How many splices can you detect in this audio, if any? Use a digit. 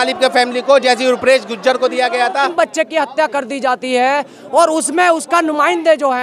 1